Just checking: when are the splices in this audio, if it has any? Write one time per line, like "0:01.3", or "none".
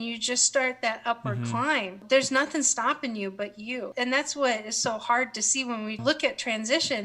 0:02.0
0:03.9
0:06.0